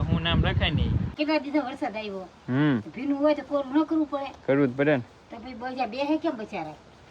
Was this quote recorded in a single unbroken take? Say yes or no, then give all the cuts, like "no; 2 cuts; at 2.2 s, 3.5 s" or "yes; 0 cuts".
no; 1 cut; at 1.1 s